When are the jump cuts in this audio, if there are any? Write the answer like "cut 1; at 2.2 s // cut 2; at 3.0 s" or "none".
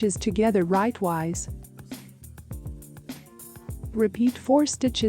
cut 1; at 1.4 s // cut 2; at 3.9 s